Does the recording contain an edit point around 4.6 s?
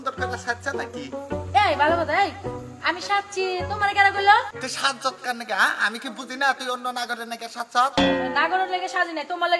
yes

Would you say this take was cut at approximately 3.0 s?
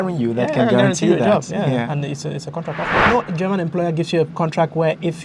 yes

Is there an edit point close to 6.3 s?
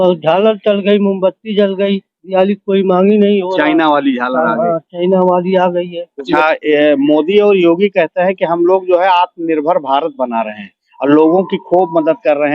yes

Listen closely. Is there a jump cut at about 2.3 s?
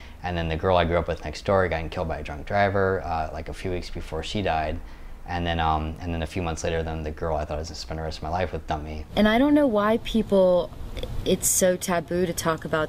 no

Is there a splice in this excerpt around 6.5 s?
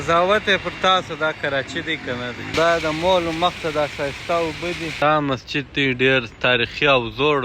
no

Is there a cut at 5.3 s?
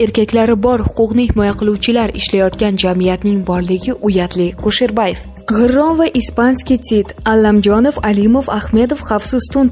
yes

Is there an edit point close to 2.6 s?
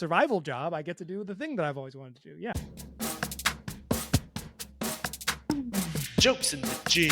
yes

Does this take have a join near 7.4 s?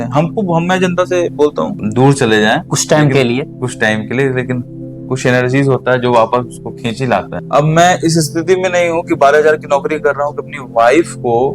yes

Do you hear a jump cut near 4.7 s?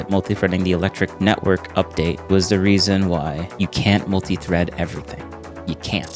no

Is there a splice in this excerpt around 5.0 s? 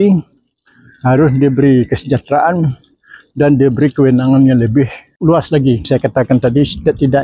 yes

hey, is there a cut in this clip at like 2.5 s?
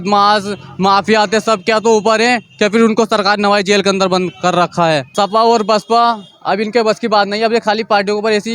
no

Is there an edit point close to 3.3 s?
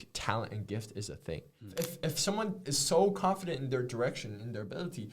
no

